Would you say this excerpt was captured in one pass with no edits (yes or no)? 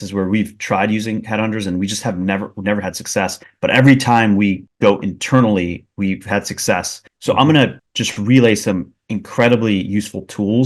yes